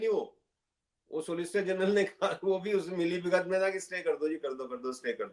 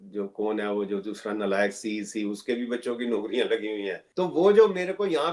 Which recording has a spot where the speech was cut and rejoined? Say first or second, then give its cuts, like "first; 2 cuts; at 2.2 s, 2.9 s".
second; 1 cut; at 4.0 s